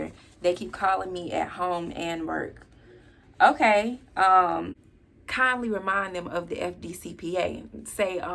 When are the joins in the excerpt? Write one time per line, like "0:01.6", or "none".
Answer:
0:04.8